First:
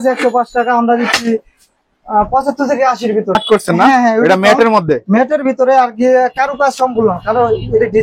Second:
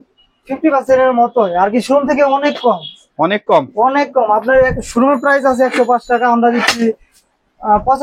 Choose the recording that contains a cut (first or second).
first